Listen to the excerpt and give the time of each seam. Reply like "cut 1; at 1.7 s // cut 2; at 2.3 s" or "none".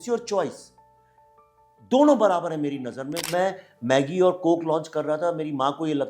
cut 1; at 3.3 s